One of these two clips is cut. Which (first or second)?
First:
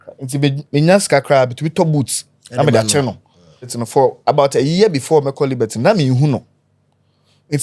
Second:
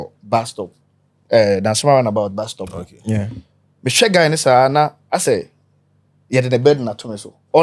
first